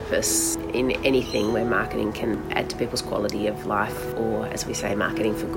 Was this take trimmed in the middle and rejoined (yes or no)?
no